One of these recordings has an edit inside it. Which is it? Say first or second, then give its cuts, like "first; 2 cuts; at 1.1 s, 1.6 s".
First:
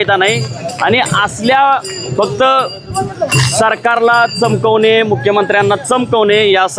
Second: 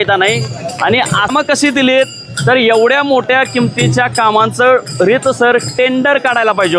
second; 1 cut; at 1.3 s